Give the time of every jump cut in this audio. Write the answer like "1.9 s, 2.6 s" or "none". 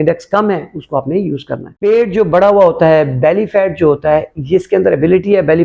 1.7 s